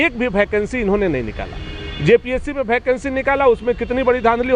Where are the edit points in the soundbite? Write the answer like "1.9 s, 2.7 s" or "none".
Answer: none